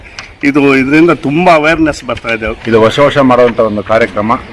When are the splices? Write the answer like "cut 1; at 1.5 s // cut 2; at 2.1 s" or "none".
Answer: cut 1; at 2.5 s